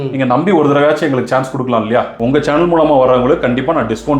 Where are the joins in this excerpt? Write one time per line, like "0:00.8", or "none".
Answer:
0:02.2